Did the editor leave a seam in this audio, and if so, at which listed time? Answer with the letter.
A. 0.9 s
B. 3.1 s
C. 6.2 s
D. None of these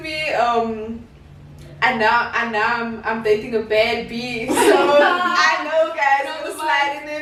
D